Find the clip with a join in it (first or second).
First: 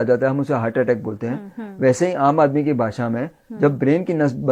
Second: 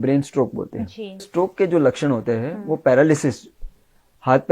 second